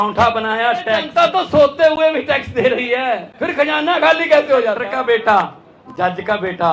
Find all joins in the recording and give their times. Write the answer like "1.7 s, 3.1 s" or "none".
1.1 s, 3.3 s, 4.8 s